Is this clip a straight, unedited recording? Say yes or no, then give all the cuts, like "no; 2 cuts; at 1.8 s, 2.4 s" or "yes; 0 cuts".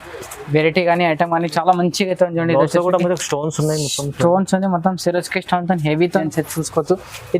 no; 1 cut; at 6.3 s